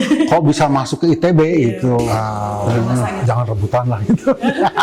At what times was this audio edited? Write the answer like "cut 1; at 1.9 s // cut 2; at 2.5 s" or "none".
cut 1; at 3.2 s